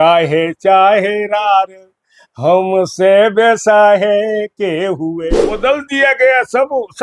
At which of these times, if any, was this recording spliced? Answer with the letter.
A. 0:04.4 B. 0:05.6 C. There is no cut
B